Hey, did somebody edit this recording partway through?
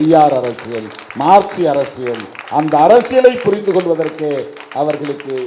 no; 0 cuts

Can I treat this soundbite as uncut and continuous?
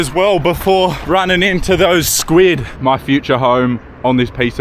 no; 2 cuts; at 1.0 s, 2.7 s

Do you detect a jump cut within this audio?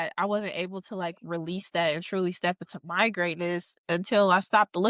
no; 0 cuts

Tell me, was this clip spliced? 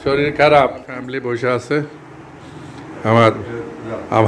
yes; 1 cut; at 1.1 s

